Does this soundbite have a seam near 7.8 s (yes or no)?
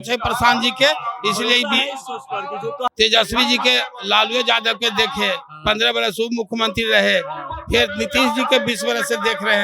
no